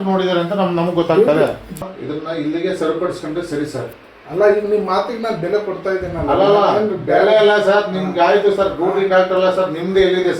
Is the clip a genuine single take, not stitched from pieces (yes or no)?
no